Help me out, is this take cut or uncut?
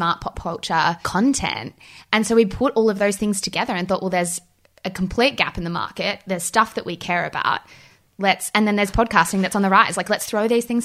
uncut